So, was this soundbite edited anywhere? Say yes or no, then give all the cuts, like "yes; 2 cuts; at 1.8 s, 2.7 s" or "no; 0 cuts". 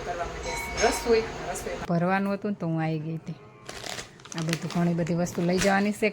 yes; 1 cut; at 1.8 s